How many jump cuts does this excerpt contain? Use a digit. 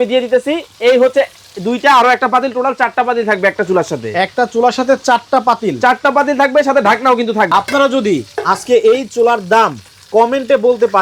1